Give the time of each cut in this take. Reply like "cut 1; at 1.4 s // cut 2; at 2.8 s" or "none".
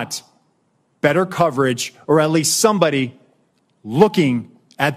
none